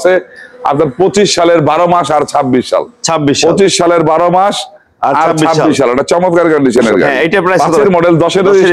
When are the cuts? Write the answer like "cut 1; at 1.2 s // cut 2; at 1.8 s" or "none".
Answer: cut 1; at 7.7 s